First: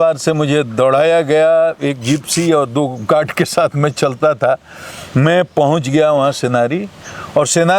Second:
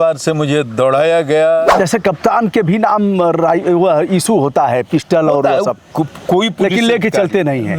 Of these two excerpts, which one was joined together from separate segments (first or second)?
second